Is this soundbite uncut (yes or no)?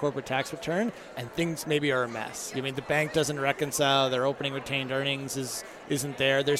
yes